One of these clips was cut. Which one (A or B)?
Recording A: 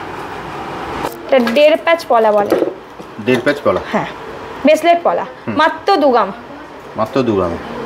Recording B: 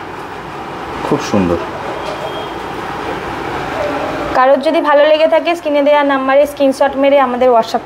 A